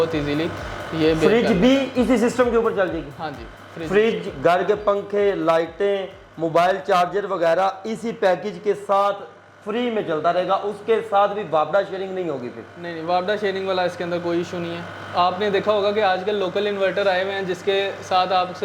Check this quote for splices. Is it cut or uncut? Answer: uncut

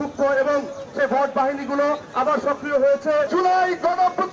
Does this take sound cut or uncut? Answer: cut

